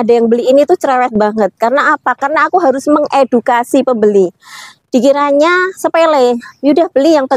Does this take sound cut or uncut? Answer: uncut